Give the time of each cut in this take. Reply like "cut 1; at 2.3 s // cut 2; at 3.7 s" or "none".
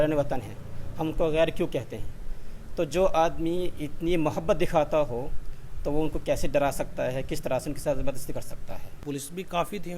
cut 1; at 8.9 s